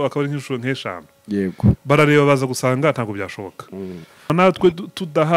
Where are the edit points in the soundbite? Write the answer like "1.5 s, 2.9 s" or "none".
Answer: 4.3 s